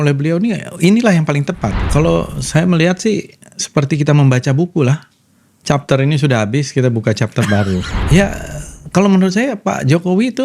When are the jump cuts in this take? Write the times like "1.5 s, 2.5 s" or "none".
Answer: 1.7 s, 7.9 s